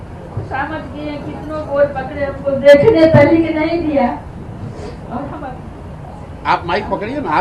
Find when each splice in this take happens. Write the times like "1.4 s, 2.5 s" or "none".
none